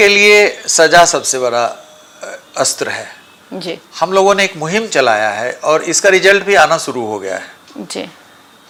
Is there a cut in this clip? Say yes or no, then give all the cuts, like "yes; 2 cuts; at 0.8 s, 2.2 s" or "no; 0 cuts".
no; 0 cuts